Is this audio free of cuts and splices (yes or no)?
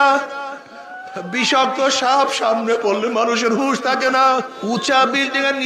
no